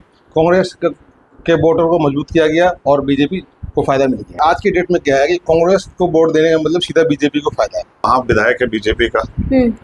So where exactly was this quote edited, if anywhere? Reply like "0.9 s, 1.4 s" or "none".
4.4 s, 8.1 s